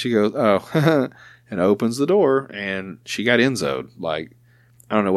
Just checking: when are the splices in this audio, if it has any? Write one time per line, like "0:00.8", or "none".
none